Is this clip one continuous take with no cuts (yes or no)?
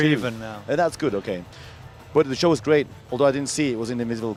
yes